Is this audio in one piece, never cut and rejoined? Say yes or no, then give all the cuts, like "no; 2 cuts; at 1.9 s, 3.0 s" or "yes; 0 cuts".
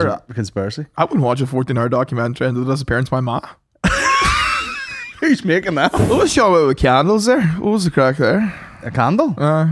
no; 1 cut; at 6.0 s